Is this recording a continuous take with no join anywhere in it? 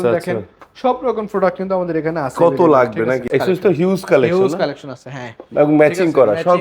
no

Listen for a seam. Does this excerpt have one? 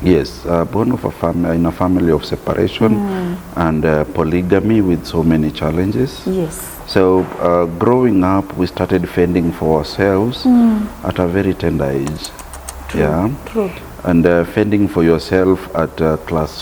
no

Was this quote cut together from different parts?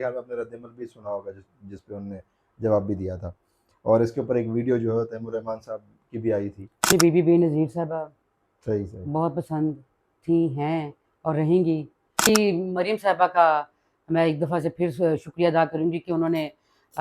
yes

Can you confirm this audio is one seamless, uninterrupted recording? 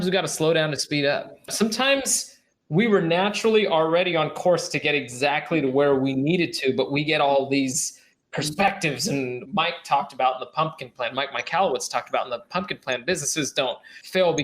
no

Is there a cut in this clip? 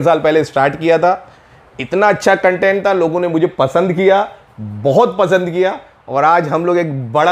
no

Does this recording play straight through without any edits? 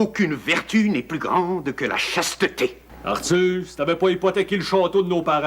no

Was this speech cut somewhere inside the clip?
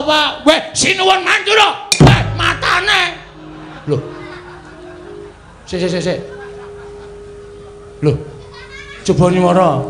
yes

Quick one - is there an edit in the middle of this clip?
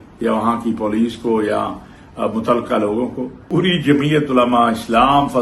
yes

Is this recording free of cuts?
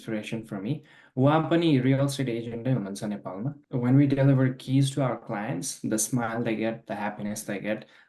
no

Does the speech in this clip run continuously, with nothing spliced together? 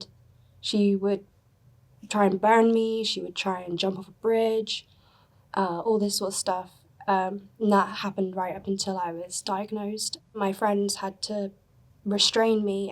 no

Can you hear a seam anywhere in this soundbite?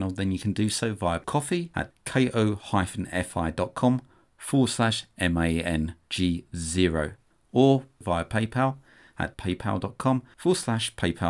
yes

